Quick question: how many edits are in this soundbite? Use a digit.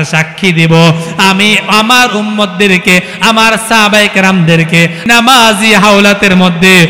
1